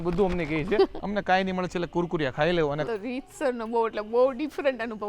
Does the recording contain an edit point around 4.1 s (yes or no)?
no